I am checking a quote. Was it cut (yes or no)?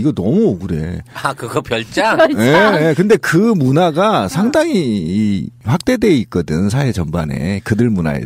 no